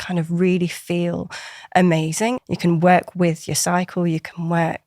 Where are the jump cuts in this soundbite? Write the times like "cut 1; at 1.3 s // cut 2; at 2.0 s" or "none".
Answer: cut 1; at 2.4 s